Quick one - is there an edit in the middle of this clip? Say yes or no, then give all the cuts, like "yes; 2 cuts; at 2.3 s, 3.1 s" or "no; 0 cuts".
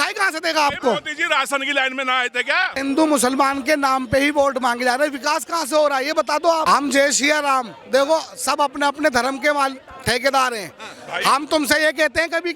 yes; 2 cuts; at 2.8 s, 6.6 s